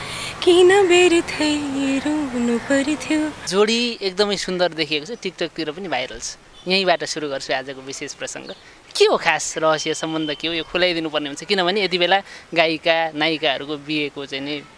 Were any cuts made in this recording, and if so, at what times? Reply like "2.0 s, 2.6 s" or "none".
3.4 s